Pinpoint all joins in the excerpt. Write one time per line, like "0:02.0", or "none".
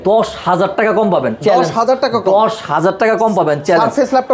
none